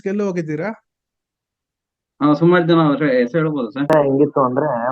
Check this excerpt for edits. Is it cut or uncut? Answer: cut